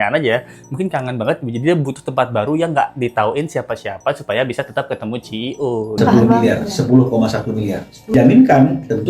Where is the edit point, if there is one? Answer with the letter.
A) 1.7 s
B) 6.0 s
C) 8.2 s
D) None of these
B